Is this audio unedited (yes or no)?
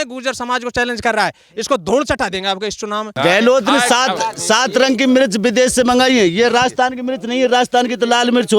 no